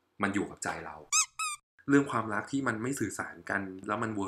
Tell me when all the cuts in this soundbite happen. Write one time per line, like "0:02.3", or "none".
0:01.4